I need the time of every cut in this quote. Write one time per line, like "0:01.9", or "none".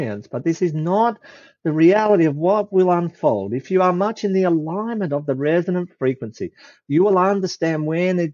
none